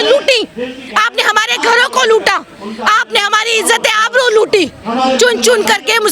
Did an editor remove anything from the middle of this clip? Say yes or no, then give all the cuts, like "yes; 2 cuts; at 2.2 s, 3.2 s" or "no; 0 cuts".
yes; 1 cut; at 4.9 s